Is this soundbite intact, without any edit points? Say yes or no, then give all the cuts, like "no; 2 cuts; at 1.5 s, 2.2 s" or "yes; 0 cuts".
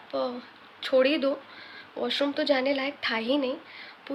yes; 0 cuts